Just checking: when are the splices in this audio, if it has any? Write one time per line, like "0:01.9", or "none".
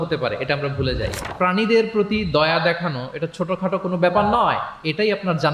0:01.3